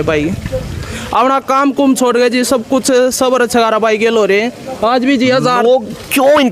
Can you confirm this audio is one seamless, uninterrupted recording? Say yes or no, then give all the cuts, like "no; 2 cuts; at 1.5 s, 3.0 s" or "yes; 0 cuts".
yes; 0 cuts